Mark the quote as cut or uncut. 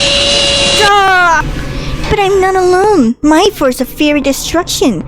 cut